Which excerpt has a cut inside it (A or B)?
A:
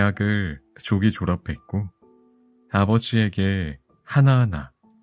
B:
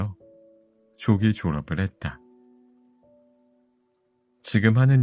B